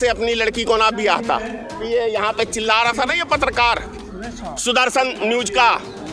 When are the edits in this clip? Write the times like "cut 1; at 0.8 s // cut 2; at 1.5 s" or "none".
cut 1; at 1.8 s